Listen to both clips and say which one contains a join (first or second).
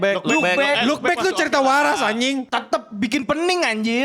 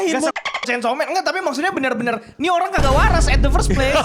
first